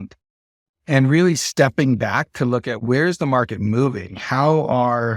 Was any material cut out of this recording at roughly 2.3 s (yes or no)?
no